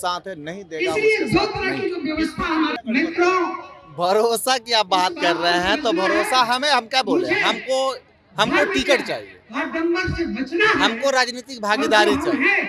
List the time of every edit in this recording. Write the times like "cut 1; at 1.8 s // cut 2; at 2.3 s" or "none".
cut 1; at 2.8 s